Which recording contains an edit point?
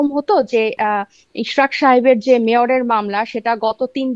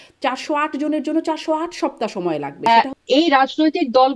second; 1 cut; at 2.7 s

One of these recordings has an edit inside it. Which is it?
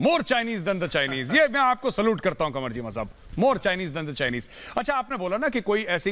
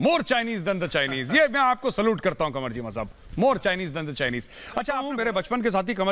second; 1 cut; at 5.1 s

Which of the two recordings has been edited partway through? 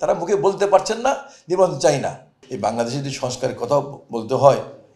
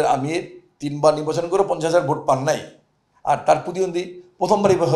first; 1 cut; at 2.4 s

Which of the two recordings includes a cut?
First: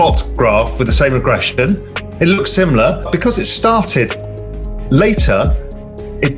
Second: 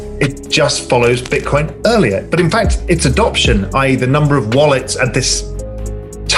first; 1 cut; at 3.1 s

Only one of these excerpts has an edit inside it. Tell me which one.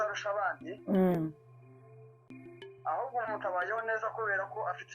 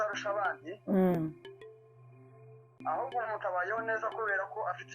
second; 2 cuts; at 1.3 s, 2.7 s

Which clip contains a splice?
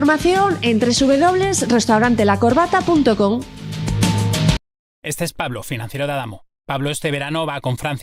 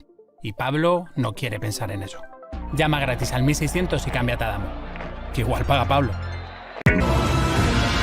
second; 1 cut; at 6.8 s

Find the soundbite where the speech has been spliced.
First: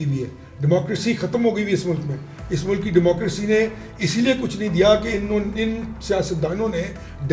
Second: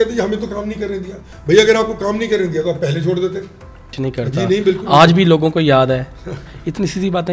second; 1 cut; at 3.9 s

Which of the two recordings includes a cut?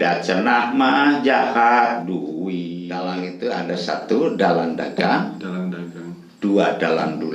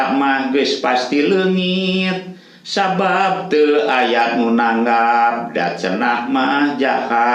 first; 1 cut; at 3.0 s

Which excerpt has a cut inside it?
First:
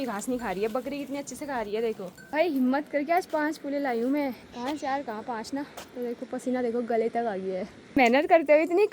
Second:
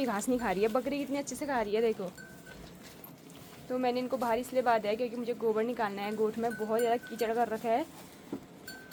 first; 3 cuts; at 2.3 s, 4.4 s, 8.0 s

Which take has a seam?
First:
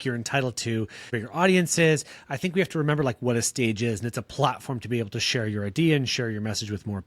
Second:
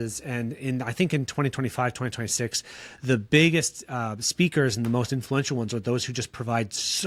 first; 1 cut; at 1.2 s

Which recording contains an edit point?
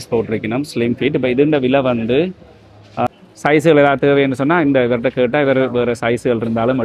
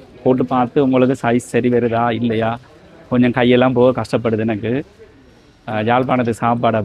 first; 1 cut; at 3.1 s

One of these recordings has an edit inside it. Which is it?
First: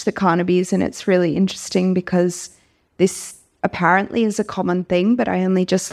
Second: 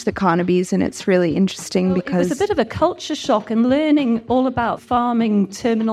second; 2 cuts; at 2.3 s, 4.8 s

